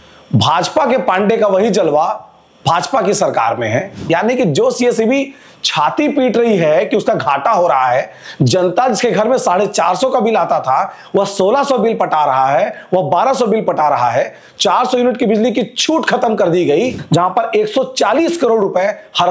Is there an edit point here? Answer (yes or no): yes